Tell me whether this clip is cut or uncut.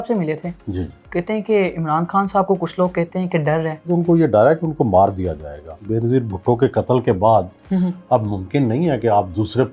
cut